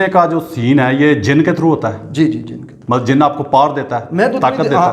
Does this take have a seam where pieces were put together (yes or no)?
no